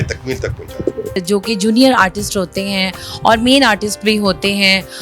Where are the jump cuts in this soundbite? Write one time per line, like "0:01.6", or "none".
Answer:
0:01.2